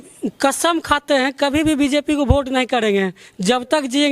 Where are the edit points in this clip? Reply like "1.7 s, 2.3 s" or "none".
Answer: none